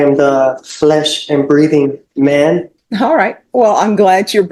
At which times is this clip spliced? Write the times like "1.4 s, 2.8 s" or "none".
2.8 s